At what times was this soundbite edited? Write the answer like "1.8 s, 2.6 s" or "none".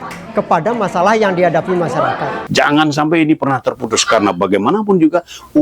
2.3 s